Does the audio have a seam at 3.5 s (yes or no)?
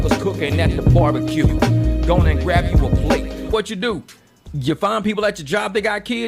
yes